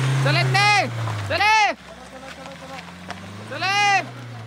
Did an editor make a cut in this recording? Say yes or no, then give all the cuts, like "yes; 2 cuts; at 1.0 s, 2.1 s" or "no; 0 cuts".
no; 0 cuts